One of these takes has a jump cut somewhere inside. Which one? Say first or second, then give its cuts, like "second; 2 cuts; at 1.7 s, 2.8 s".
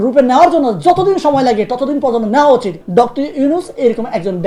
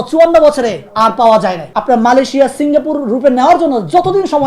second; 2 cuts; at 0.8 s, 1.7 s